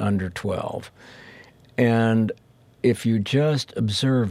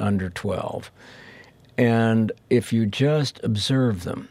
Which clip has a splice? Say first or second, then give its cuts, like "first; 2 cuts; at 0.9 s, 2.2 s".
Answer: second; 1 cut; at 2.4 s